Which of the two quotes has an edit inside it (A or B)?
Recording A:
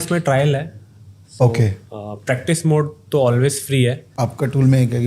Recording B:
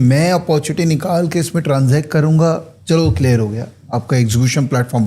A